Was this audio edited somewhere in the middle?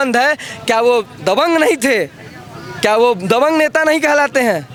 no; 0 cuts

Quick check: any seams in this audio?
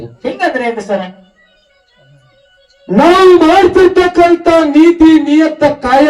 no; 0 cuts

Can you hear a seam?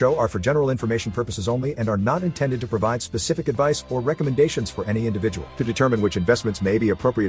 no; 0 cuts

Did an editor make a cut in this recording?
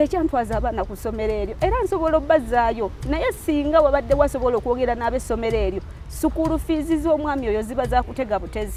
no; 0 cuts

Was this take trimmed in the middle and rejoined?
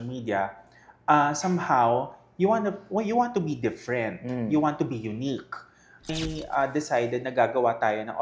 yes; 1 cut; at 6.1 s

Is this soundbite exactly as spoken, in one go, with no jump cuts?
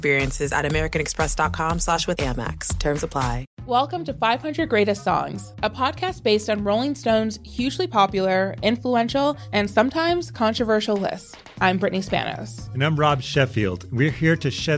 no; 1 cut; at 3.5 s

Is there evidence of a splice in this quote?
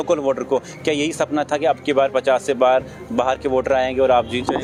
no; 0 cuts

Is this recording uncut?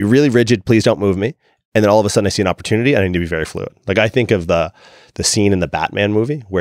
yes; 0 cuts

